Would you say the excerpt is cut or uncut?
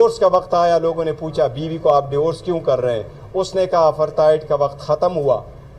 uncut